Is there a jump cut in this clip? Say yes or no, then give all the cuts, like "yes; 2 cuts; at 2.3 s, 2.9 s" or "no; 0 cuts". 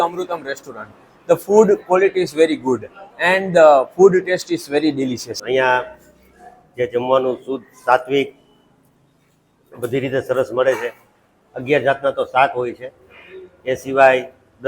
yes; 1 cut; at 5.3 s